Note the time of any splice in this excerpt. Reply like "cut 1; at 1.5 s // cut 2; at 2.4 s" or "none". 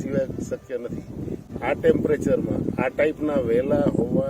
cut 1; at 1.4 s